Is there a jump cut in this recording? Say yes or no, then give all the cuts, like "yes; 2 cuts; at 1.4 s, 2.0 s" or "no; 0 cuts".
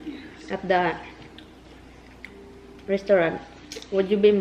no; 0 cuts